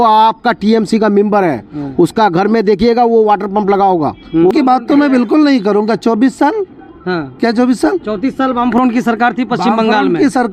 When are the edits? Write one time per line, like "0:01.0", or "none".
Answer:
0:04.5